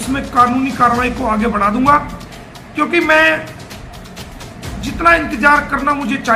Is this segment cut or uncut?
uncut